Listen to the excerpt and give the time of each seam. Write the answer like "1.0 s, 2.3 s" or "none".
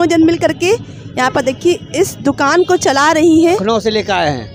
3.6 s